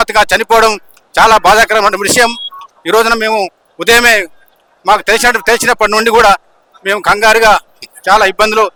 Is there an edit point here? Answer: no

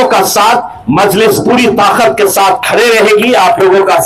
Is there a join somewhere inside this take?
no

